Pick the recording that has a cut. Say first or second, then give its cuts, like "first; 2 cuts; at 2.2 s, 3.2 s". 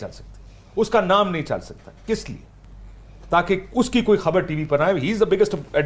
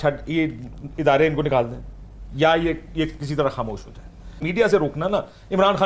second; 1 cut; at 4.4 s